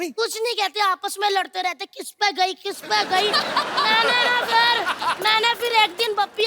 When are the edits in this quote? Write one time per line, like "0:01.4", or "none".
0:05.1